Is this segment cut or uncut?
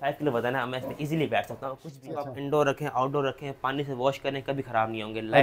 cut